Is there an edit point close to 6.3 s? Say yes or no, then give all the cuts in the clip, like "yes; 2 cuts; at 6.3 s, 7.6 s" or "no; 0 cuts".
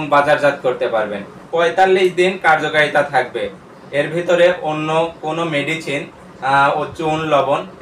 no; 1 cut; at 1.4 s